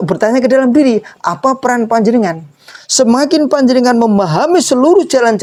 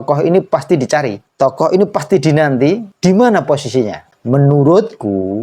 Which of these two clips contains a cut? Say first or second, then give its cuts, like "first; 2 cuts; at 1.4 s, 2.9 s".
second; 3 cuts; at 1.2 s, 2.9 s, 4.1 s